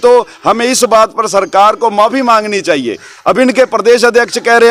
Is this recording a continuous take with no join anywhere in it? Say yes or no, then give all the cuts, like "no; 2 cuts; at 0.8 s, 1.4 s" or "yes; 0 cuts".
yes; 0 cuts